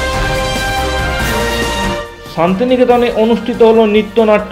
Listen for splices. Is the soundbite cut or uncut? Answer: uncut